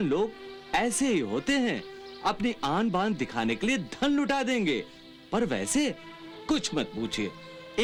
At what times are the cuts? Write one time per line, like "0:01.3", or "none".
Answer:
none